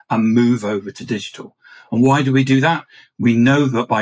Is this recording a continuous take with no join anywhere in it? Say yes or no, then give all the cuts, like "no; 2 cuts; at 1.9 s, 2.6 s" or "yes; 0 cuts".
no; 1 cut; at 0.9 s